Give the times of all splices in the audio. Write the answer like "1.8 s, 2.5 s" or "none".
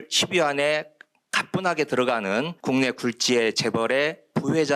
2.5 s